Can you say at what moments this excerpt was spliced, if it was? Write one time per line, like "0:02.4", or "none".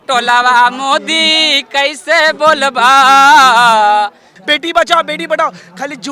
0:04.3